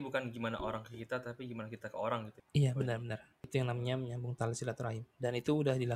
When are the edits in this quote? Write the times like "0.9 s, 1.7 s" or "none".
2.4 s, 3.5 s